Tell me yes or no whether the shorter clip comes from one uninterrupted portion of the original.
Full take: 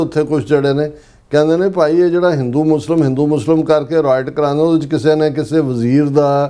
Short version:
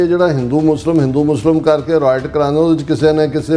yes